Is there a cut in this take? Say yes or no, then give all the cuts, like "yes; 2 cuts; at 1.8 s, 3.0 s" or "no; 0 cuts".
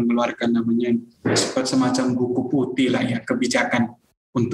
no; 0 cuts